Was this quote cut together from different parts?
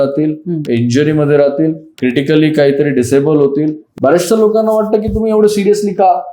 yes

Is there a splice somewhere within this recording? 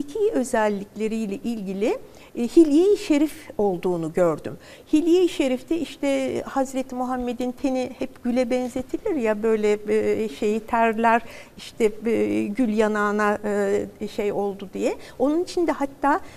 no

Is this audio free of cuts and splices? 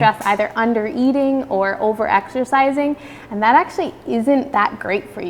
yes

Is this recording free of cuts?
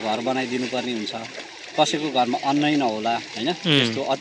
yes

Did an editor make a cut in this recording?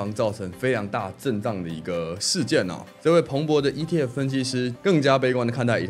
yes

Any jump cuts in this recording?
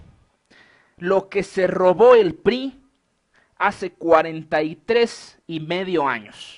yes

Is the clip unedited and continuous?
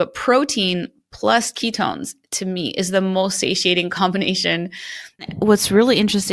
no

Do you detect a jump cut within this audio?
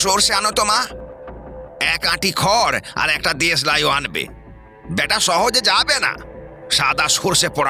no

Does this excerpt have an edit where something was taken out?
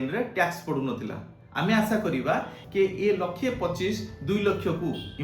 yes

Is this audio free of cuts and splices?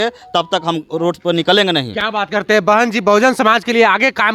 yes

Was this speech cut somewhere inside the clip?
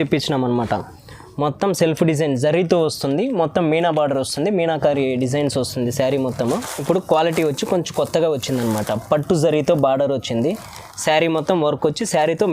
yes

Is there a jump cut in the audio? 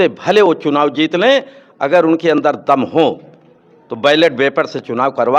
no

